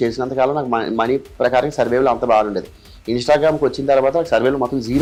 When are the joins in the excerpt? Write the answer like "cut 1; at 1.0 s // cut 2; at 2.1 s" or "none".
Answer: none